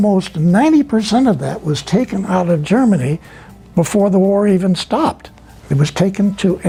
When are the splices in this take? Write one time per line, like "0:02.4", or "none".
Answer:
none